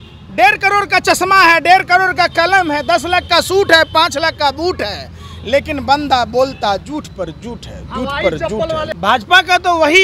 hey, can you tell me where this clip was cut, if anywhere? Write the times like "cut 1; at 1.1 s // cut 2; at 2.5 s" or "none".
cut 1; at 8.9 s